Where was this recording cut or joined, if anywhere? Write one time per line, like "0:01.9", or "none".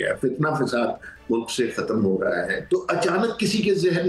0:02.6